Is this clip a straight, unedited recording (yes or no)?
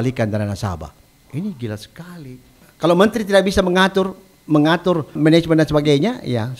no